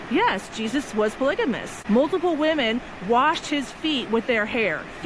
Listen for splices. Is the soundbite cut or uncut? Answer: cut